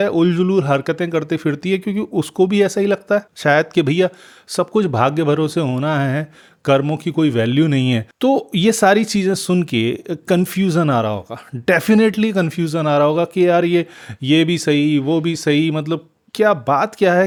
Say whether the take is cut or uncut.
uncut